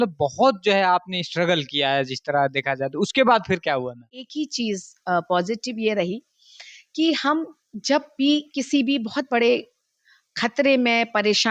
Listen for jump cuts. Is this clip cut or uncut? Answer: cut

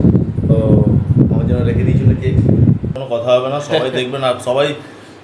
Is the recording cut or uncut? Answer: cut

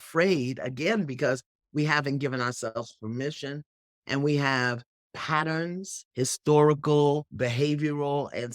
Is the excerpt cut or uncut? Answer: cut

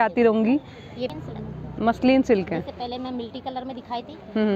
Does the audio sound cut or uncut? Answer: cut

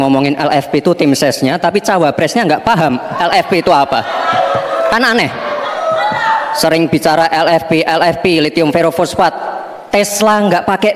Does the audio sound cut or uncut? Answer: uncut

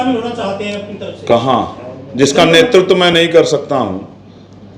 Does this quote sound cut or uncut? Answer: uncut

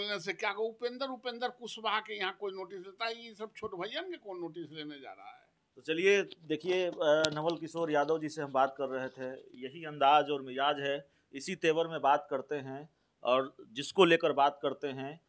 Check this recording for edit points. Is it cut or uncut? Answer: uncut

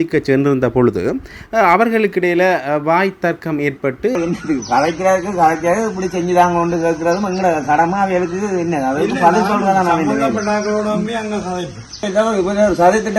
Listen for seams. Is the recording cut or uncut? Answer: cut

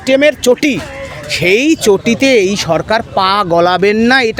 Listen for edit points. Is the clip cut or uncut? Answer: uncut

